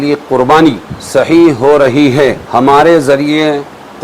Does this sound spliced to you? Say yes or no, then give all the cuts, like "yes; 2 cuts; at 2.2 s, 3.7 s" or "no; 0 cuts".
yes; 2 cuts; at 0.9 s, 2.4 s